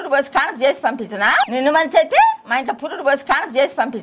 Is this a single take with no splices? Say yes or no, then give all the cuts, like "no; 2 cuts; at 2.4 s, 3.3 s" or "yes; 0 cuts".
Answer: yes; 0 cuts